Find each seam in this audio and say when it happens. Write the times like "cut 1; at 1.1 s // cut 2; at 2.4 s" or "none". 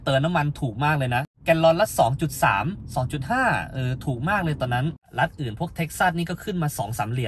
cut 1; at 1.3 s // cut 2; at 5.1 s

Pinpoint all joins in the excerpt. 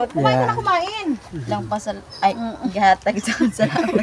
cut 1; at 1.4 s

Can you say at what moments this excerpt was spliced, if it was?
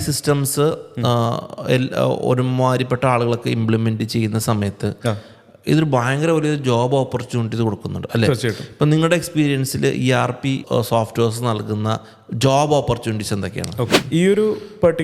cut 1; at 10.6 s // cut 2; at 14.0 s

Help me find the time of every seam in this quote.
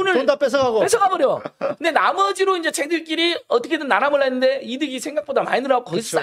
none

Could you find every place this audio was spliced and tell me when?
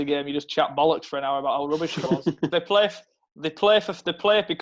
cut 1; at 2.5 s

